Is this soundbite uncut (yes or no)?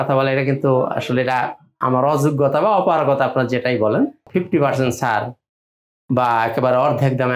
no